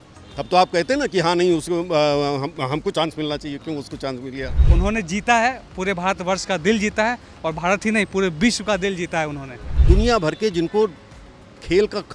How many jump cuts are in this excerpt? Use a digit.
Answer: 2